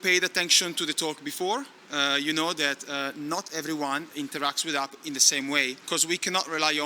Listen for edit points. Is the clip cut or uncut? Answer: cut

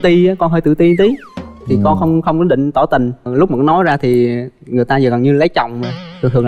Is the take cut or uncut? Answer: uncut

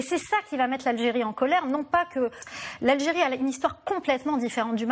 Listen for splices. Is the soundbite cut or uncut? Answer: cut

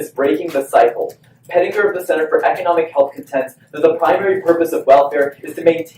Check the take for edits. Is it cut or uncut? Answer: uncut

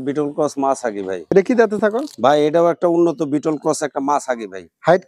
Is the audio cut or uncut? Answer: cut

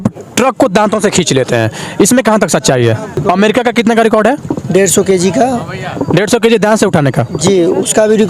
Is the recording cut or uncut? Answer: cut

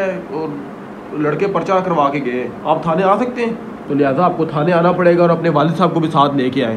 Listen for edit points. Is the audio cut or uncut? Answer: cut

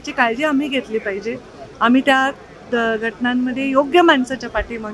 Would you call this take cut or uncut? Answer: uncut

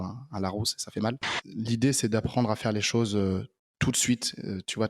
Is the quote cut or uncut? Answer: cut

